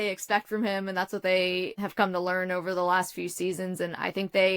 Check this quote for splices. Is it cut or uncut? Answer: cut